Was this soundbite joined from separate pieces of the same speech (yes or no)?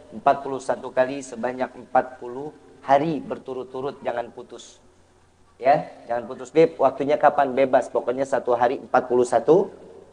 no